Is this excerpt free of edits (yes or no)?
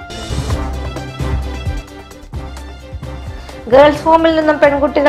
no